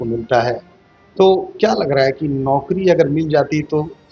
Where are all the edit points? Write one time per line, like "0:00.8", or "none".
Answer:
none